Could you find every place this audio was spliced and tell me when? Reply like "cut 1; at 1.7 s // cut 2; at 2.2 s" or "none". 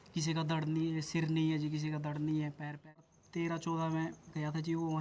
cut 1; at 3.2 s

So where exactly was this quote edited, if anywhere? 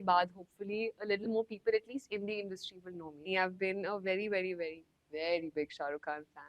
cut 1; at 3.3 s

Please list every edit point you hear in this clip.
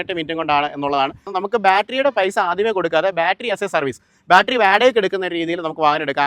cut 1; at 1.3 s

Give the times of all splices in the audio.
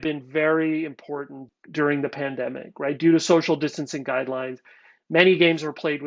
cut 1; at 1.4 s

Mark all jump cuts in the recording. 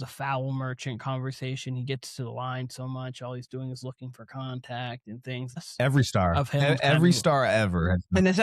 cut 1; at 5.6 s

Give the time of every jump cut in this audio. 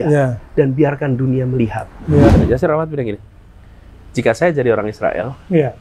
cut 1; at 2.3 s

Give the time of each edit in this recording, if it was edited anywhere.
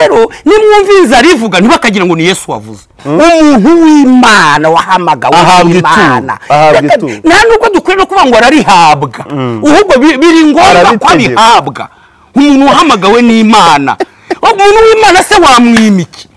cut 1; at 3.0 s

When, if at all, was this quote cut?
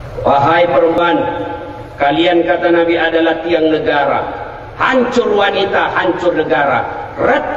cut 1; at 1.0 s

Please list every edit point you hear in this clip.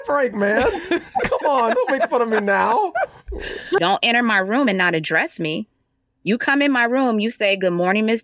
cut 1; at 3.8 s

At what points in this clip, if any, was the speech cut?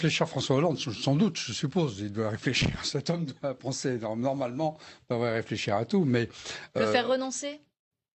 none

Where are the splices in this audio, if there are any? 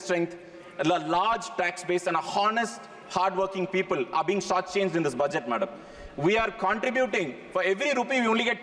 none

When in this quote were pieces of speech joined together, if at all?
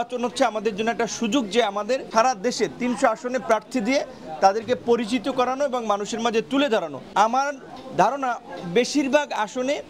cut 1; at 2.1 s // cut 2; at 7.0 s

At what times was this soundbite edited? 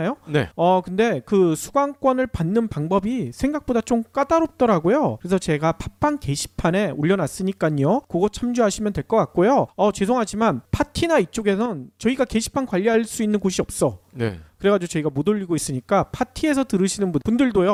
none

